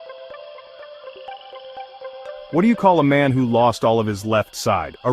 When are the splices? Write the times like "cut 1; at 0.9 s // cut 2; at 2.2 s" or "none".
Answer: cut 1; at 2.5 s